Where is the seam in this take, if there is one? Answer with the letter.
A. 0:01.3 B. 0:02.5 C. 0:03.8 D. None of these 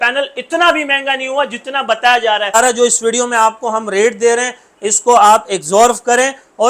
B